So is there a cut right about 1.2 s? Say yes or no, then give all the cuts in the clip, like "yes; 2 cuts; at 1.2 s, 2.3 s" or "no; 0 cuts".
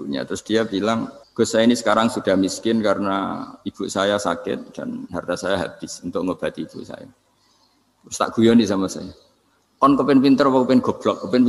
yes; 1 cut; at 1.2 s